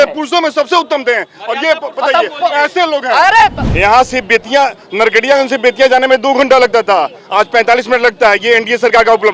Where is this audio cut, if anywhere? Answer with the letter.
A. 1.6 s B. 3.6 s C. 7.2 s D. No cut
B